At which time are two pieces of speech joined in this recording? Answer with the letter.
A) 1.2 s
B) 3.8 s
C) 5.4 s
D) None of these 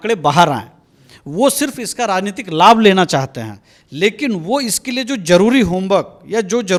D